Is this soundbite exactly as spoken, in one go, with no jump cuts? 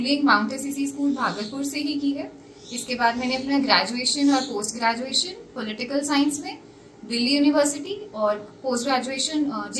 yes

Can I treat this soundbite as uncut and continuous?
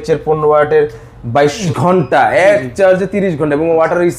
no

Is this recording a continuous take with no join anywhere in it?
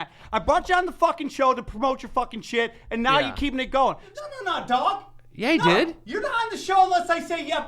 no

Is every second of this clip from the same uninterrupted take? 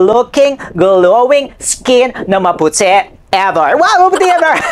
yes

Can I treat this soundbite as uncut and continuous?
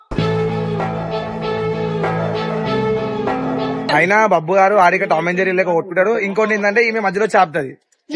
no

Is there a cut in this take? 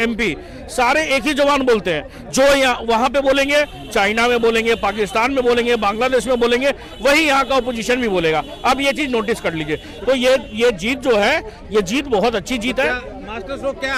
no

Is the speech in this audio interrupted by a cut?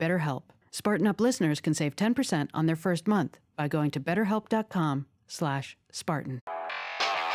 yes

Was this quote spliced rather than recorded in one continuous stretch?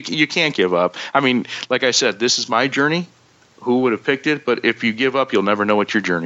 no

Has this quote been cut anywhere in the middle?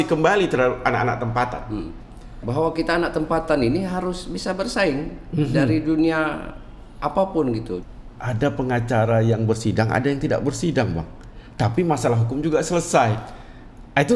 yes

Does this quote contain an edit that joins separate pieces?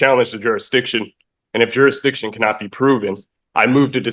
no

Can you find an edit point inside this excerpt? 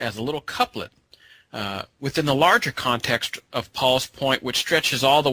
yes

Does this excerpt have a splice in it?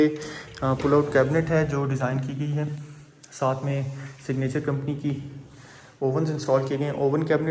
no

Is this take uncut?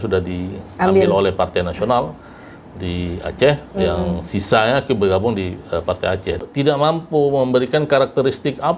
no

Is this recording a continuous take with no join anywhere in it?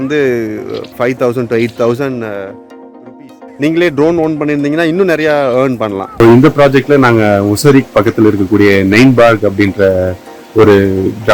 no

